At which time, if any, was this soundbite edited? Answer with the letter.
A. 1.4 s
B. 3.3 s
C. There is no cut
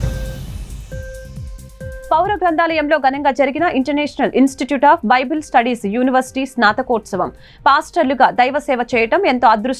A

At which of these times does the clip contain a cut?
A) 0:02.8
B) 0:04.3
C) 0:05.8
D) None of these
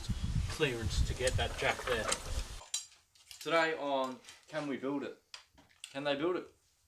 A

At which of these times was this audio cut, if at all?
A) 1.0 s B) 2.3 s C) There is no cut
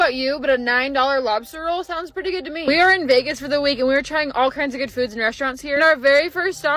C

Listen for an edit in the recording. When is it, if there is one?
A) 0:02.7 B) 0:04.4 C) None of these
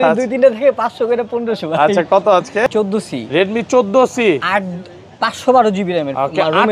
A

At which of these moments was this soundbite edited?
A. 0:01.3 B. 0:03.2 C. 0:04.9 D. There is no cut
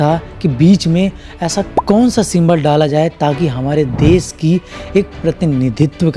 D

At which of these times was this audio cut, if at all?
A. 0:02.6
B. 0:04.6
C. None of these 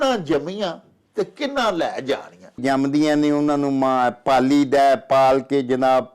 A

